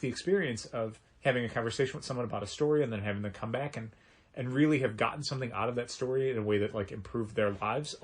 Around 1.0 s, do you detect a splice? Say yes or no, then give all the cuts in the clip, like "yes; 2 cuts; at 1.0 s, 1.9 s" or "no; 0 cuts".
yes; 1 cut; at 1.0 s